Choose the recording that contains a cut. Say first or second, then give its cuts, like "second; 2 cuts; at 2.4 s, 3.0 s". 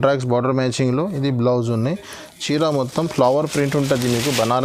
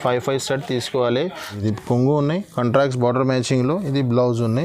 second; 1 cut; at 1.5 s